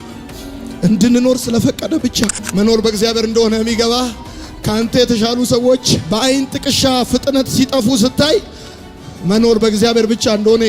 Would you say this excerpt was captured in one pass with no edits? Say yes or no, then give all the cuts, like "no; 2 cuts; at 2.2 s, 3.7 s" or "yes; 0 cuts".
no; 1 cut; at 2.4 s